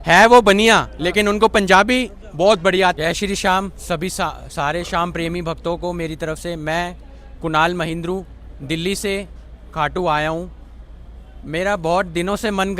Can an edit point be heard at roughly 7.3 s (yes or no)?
no